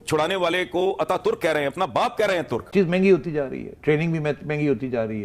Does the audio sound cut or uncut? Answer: cut